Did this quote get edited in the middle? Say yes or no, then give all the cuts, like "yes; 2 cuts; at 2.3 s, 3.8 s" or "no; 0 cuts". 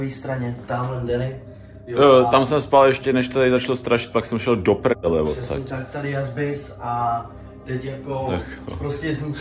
no; 0 cuts